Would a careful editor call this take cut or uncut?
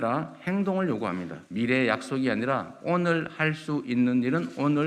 uncut